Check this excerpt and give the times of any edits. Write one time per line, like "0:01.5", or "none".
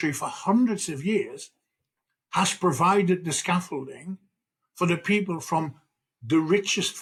none

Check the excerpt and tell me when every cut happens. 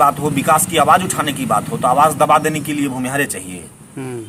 none

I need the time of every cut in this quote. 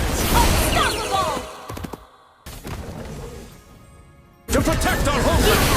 0:02.5

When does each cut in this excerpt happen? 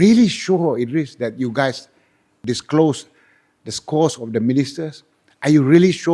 0:02.4

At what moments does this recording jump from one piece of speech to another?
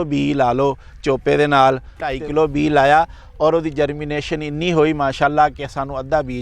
0:02.2

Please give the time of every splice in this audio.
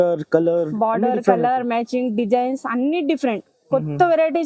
none

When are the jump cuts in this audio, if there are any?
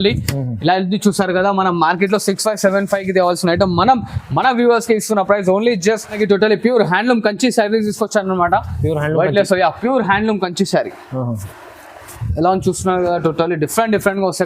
0:06.2

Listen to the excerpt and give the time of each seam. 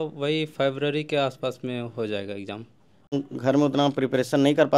0:03.3

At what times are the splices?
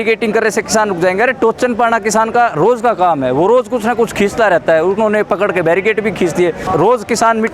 0:06.6

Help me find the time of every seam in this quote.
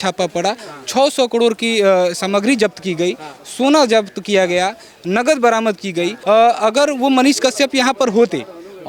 0:06.2

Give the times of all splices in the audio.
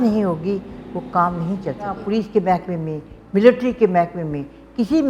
0:02.0

